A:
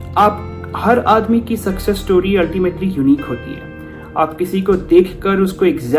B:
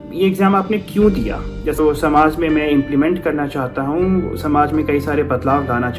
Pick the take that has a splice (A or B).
B